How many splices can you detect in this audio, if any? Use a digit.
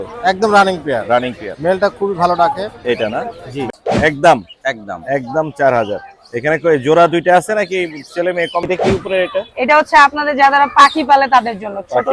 2